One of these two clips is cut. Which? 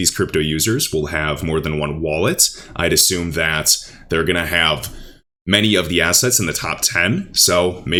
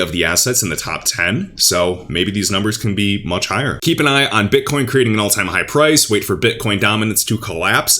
second; 1 cut; at 3.8 s

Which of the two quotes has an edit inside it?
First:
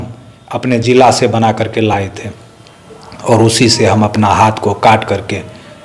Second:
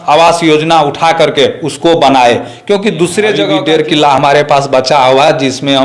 second; 1 cut; at 3.4 s

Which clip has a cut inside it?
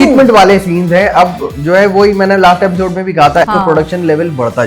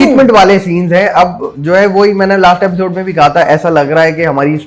first; 1 cut; at 3.5 s

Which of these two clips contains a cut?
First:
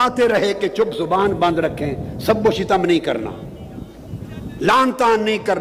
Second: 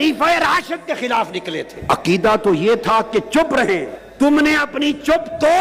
second; 2 cuts; at 1.7 s, 4.0 s

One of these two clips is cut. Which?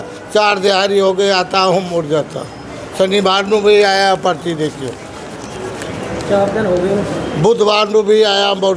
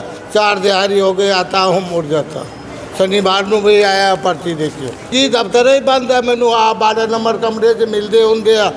second; 1 cut; at 5.1 s

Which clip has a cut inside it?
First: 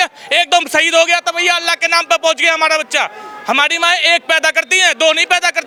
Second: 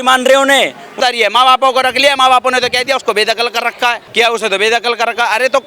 second; 2 cuts; at 0.9 s, 4.0 s

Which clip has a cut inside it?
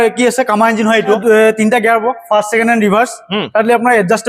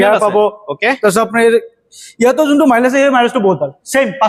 first; 1 cut; at 1.2 s

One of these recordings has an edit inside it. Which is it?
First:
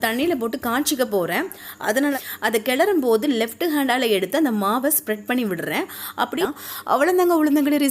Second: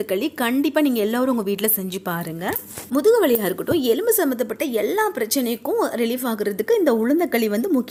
first; 2 cuts; at 2.1 s, 6.3 s

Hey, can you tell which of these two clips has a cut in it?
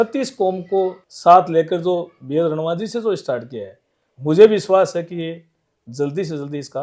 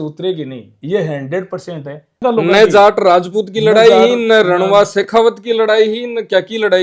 second; 1 cut; at 2.2 s

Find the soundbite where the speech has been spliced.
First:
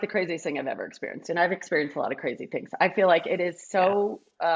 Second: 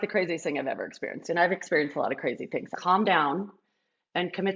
second; 1 cut; at 2.7 s

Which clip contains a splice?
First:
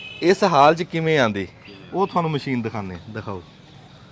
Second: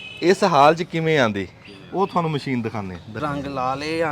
second; 1 cut; at 3.1 s

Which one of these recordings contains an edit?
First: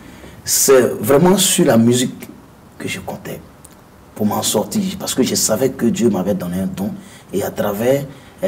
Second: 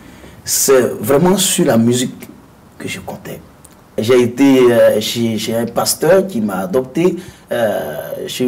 second; 1 cut; at 4.0 s

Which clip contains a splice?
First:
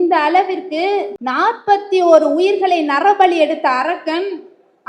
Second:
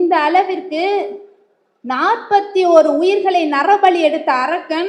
first; 1 cut; at 1.2 s

